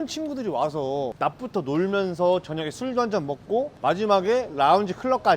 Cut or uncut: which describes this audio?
cut